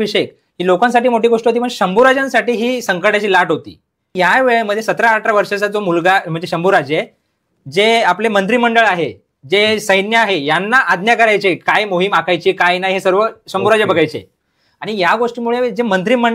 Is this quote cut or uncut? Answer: cut